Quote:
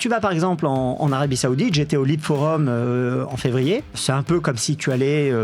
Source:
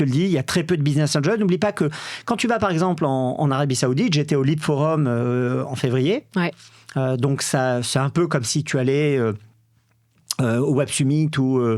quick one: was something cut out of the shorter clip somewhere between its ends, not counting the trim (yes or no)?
yes